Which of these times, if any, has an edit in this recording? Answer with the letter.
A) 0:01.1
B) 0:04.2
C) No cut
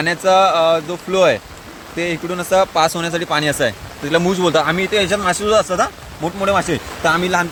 C